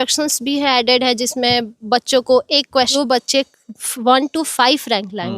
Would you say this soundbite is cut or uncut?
cut